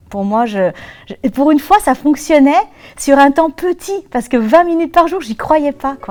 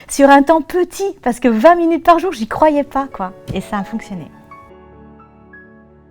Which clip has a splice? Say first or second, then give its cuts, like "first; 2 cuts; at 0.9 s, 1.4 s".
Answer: second; 1 cut; at 4.3 s